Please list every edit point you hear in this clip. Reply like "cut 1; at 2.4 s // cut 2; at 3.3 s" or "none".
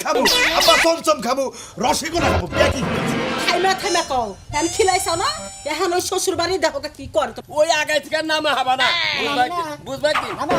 cut 1; at 7.3 s